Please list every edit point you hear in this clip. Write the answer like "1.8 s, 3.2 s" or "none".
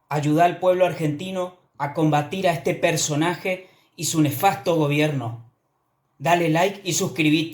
none

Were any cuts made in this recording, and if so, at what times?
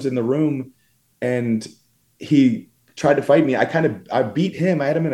none

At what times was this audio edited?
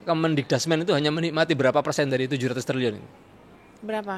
none

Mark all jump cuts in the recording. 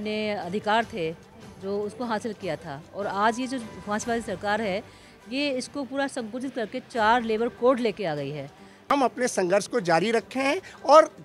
8.9 s

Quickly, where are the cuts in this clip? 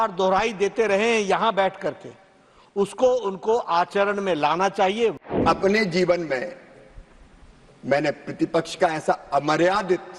5.3 s

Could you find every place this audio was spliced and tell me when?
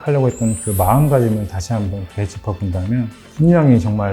3.2 s

